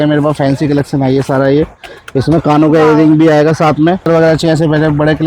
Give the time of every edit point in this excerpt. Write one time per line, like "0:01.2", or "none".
0:04.0